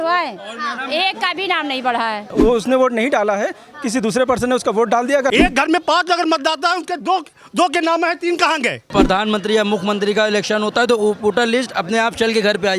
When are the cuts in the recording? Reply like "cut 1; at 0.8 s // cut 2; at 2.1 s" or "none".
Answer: cut 1; at 2.3 s // cut 2; at 5.3 s // cut 3; at 8.9 s